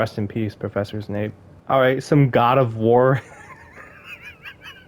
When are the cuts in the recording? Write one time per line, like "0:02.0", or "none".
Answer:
0:01.5